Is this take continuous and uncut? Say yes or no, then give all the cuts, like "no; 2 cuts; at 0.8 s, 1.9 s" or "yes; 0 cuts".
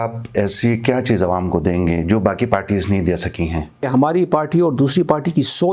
no; 1 cut; at 3.9 s